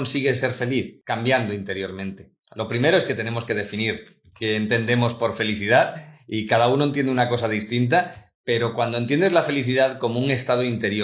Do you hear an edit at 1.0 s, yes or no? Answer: yes